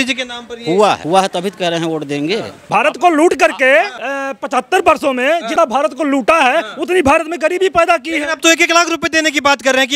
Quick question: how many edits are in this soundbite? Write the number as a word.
four